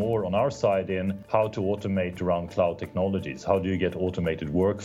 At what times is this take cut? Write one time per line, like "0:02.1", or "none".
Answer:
0:01.2